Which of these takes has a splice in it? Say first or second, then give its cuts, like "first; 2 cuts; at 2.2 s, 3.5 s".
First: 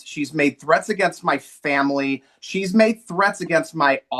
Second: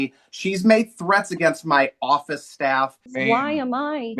second; 1 cut; at 3.1 s